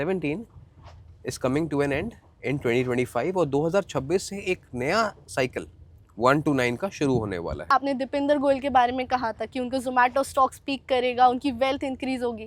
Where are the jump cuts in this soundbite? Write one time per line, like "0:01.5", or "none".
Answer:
0:07.6